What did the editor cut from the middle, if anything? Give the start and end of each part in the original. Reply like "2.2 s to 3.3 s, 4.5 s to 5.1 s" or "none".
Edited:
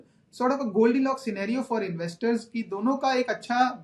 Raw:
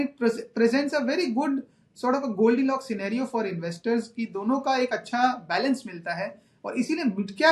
none